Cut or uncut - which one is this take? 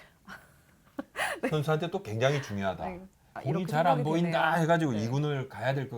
cut